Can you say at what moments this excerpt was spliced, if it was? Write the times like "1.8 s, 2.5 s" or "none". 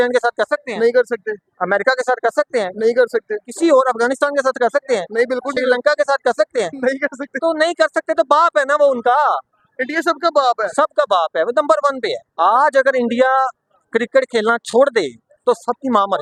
none